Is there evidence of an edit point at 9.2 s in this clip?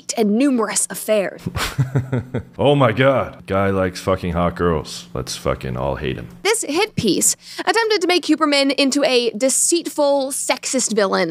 no; 2 cuts; at 1.3 s, 6.4 s

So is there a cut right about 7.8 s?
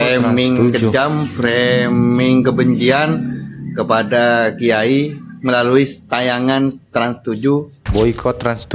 yes; 1 cut; at 7.8 s

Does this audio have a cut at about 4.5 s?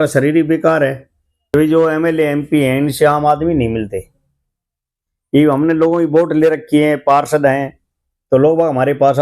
no; 1 cut; at 1.5 s

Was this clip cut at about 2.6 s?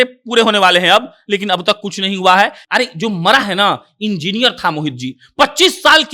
yes; 1 cut; at 2.6 s

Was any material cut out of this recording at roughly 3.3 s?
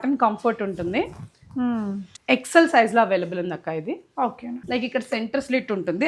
no; 2 cuts; at 2.0 s, 4.6 s

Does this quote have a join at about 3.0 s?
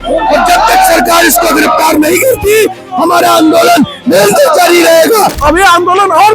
no; 1 cut; at 5.3 s

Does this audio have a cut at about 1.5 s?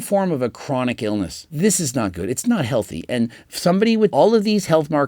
yes; 2 cuts; at 1.5 s, 4.1 s

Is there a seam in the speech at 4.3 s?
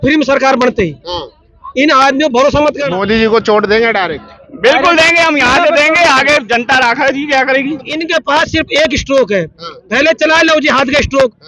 no; 2 cuts; at 2.9 s, 8.0 s

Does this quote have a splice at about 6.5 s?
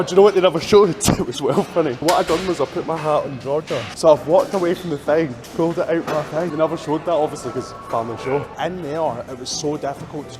yes; 4 cuts; at 2.0 s, 3.9 s, 6.5 s, 8.5 s

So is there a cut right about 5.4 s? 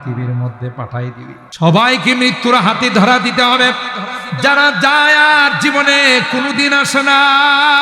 no; 1 cut; at 1.4 s

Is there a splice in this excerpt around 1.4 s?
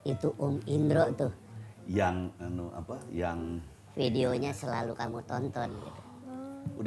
no; 0 cuts

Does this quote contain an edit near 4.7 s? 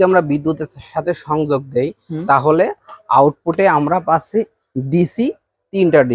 no; 0 cuts

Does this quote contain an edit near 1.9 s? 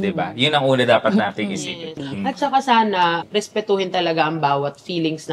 yes; 1 cut; at 1.9 s

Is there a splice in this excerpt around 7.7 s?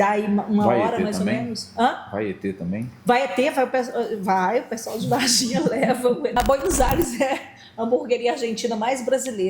no; 1 cut; at 6.3 s

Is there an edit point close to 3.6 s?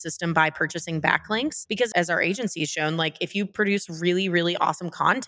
no; 1 cut; at 1.8 s

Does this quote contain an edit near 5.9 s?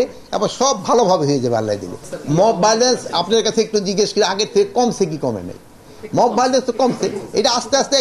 no; 1 cut; at 2.1 s

